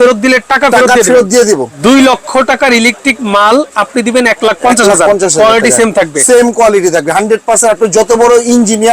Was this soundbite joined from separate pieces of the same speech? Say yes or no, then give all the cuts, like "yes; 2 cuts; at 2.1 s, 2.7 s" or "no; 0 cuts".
yes; 1 cut; at 1.7 s